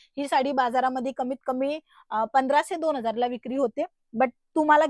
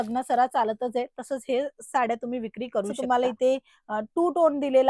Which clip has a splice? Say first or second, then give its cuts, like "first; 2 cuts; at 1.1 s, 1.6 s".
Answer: second; 1 cut; at 2.9 s